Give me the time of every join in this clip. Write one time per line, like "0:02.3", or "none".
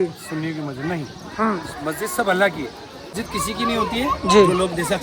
0:03.2